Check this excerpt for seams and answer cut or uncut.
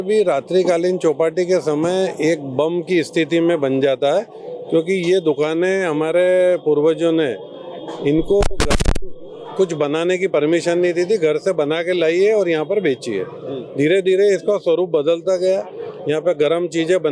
uncut